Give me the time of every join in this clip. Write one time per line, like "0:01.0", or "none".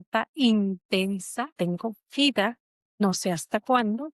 0:01.5
0:03.0